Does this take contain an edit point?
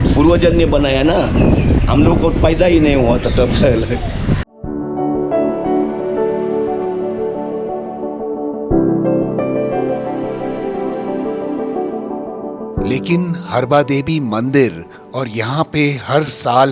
no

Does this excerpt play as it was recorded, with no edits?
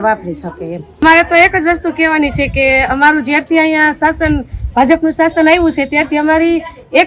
no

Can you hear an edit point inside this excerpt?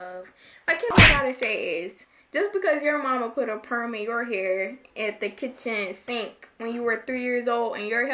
yes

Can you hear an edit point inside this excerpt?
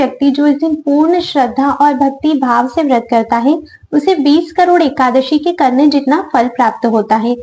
no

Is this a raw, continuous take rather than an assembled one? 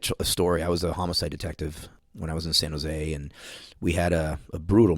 no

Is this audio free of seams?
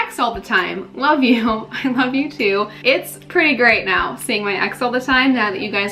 yes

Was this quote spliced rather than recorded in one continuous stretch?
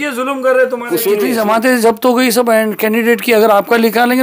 yes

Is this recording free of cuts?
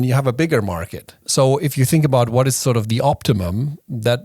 no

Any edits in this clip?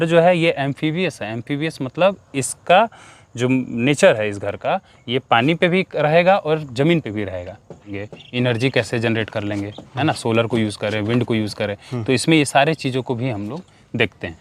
yes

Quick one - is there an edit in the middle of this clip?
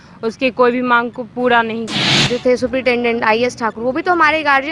yes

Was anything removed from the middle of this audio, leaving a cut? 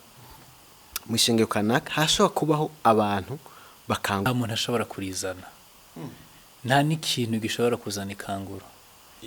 yes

